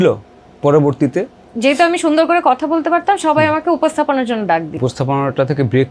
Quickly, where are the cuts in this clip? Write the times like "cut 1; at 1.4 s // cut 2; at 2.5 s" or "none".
cut 1; at 1.4 s // cut 2; at 4.8 s